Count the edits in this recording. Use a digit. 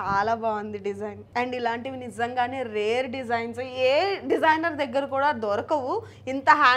1